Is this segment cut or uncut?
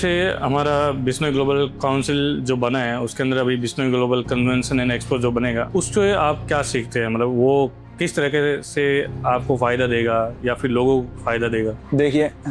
cut